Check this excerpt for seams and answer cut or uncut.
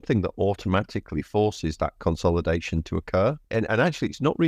cut